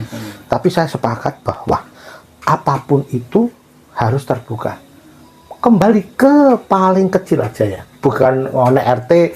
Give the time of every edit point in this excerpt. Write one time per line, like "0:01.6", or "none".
none